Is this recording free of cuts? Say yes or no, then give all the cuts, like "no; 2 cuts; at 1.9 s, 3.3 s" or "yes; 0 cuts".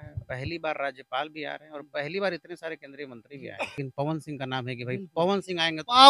no; 1 cut; at 3.8 s